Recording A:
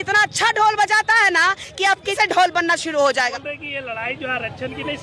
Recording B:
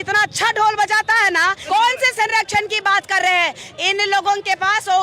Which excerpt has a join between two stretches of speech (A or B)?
B